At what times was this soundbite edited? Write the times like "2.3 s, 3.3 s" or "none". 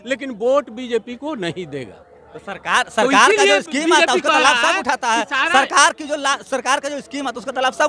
none